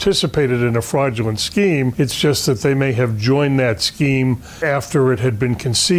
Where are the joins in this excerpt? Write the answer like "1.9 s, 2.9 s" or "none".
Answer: 1.9 s, 4.5 s